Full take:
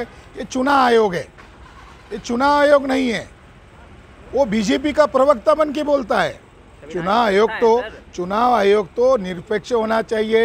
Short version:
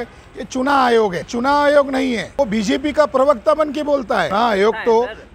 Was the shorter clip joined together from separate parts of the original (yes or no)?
yes